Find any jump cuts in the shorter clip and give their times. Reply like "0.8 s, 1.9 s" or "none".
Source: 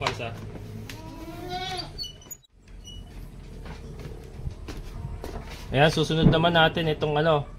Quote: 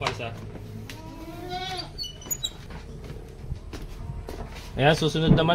2.7 s